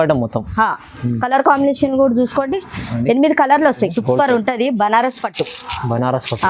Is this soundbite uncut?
no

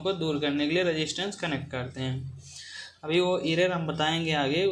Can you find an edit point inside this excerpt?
no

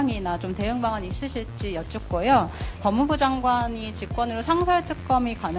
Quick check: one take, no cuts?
no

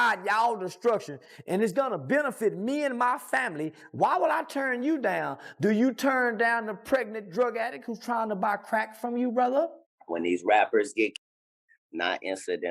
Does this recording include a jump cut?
yes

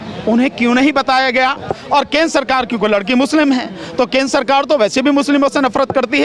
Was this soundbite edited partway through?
yes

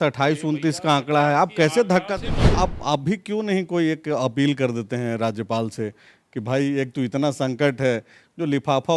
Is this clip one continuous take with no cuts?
no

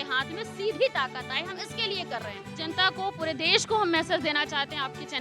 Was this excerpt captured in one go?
no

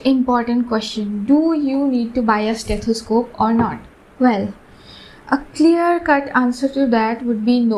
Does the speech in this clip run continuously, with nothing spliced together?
yes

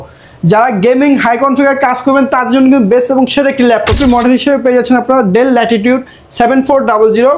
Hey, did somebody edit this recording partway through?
yes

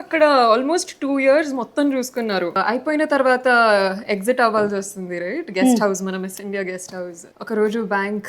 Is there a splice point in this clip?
yes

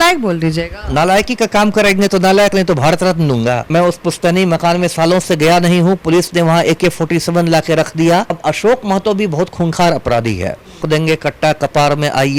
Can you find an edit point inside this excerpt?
yes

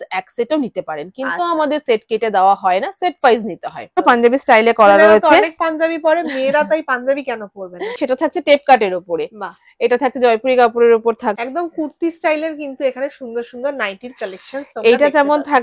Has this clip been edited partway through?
yes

